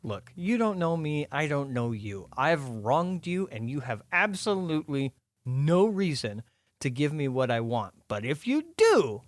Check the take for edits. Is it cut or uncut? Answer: uncut